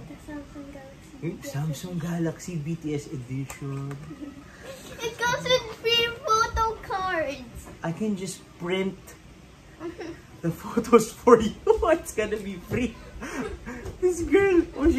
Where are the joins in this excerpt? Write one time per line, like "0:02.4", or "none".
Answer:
0:04.1

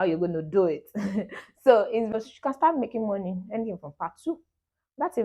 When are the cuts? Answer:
0:02.1

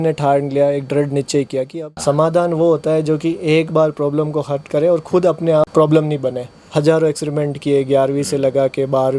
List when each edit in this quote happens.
0:01.8
0:05.7
0:06.7

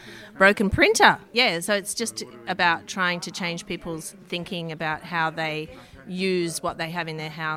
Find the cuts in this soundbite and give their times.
0:01.2

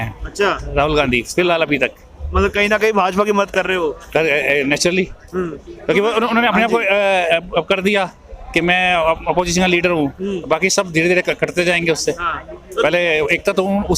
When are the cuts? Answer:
none

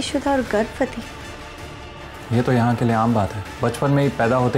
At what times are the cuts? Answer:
0:03.4

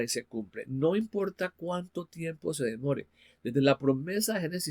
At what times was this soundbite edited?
none

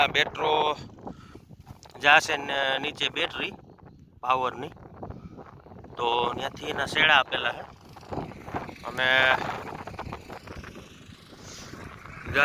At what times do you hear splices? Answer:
none

